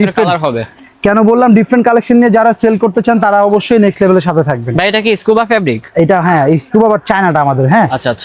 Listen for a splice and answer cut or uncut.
uncut